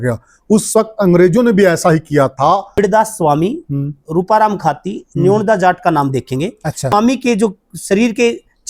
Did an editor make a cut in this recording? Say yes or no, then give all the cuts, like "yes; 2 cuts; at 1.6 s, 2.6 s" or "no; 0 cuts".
yes; 2 cuts; at 2.8 s, 6.9 s